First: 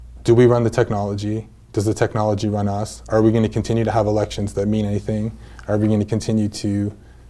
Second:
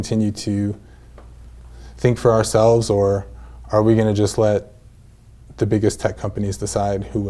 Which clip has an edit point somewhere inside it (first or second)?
first